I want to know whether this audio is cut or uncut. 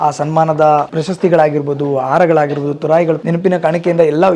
cut